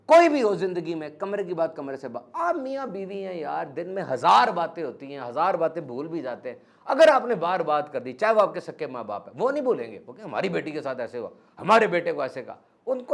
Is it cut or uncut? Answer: uncut